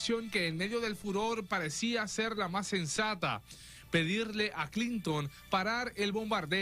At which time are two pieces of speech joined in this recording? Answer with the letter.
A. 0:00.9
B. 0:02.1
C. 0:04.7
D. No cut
C